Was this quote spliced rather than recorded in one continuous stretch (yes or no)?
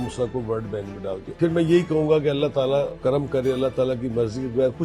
yes